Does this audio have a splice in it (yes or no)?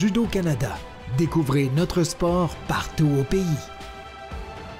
yes